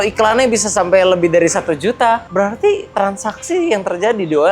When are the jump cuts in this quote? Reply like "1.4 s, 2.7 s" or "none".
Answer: 2.3 s